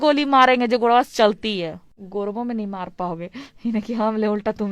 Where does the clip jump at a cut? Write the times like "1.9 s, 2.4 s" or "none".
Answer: 1.9 s